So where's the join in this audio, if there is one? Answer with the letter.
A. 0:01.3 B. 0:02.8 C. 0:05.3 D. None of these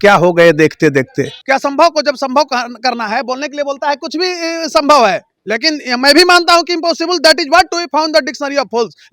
A